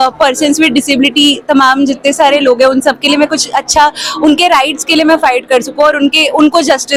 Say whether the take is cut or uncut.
uncut